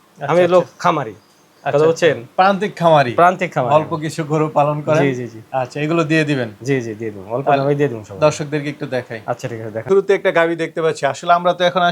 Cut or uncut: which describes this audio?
uncut